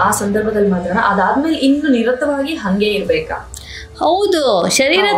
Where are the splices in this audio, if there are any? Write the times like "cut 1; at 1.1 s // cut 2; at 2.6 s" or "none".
none